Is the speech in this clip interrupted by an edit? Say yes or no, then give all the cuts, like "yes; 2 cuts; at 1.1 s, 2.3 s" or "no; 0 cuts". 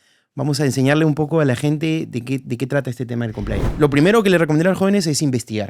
yes; 1 cut; at 3.7 s